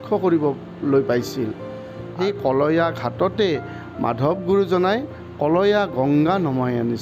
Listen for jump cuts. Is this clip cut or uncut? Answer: cut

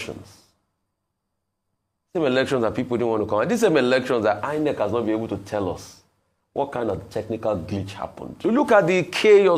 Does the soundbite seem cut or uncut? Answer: cut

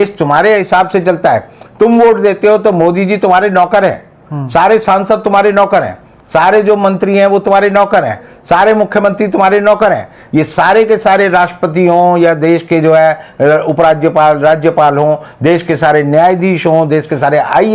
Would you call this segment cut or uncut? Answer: uncut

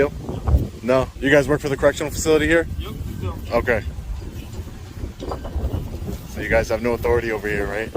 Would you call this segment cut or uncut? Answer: cut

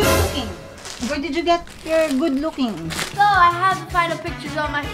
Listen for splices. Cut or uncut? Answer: cut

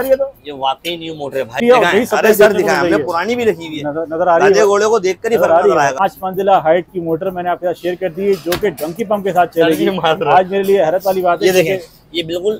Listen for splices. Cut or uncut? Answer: cut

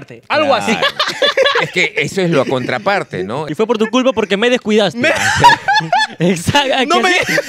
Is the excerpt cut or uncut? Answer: cut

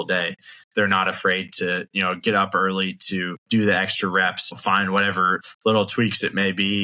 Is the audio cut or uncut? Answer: cut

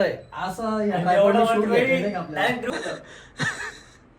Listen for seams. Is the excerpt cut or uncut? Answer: cut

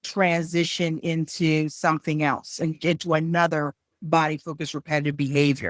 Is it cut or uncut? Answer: uncut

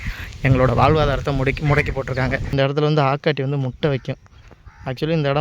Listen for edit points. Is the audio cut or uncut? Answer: cut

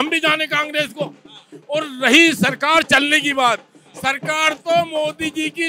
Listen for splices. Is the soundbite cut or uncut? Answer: uncut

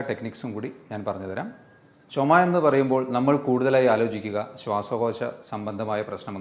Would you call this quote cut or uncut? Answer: cut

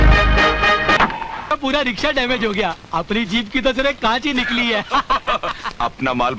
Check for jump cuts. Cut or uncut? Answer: cut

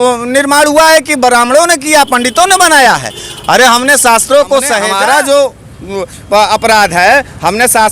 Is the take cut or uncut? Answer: cut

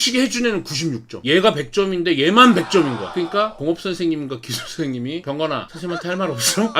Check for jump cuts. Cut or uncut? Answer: cut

